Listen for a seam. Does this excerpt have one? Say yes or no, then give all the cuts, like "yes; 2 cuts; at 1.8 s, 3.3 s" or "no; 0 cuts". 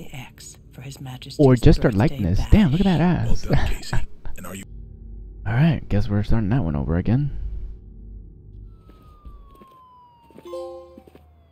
yes; 1 cut; at 4.6 s